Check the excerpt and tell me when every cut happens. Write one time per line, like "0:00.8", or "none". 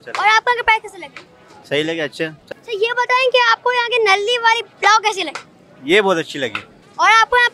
0:02.4